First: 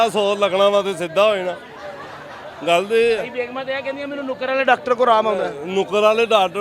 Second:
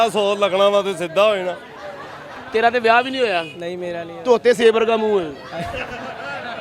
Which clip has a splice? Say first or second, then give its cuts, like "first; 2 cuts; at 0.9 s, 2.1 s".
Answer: second; 1 cut; at 2.4 s